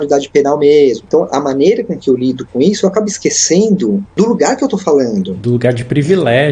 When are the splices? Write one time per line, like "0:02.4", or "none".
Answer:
0:04.1